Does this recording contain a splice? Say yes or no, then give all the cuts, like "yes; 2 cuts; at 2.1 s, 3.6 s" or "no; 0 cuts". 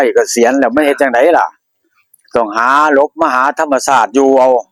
no; 0 cuts